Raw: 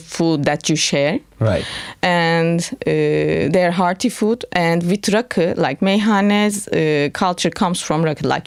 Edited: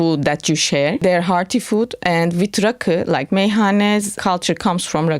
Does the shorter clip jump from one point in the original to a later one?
yes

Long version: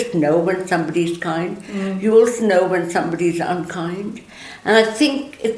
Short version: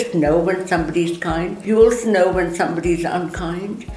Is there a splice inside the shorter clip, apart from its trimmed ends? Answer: yes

